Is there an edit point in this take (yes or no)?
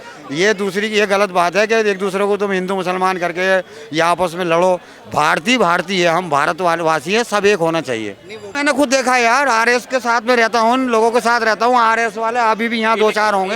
yes